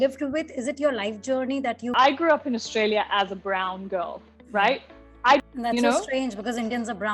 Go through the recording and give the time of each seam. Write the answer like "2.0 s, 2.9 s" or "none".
1.9 s, 5.4 s